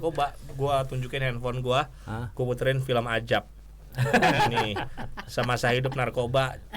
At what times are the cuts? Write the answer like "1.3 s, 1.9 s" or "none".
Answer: none